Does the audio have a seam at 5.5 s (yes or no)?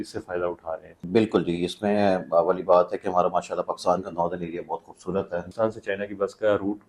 yes